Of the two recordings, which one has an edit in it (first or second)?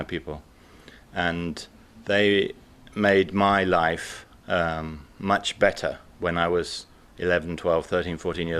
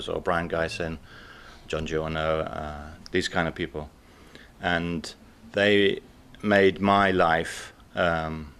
first